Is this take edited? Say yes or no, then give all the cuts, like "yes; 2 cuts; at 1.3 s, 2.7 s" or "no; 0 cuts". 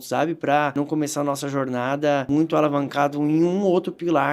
yes; 2 cuts; at 0.7 s, 2.3 s